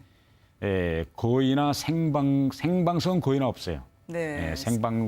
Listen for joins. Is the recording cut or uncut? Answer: cut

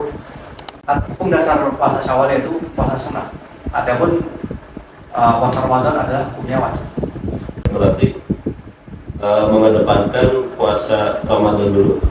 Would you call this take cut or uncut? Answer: cut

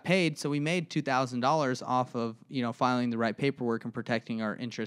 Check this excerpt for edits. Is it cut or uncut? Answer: uncut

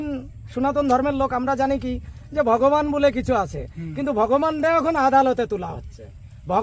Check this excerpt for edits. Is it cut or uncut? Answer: uncut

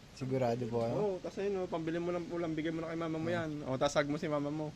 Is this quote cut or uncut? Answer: uncut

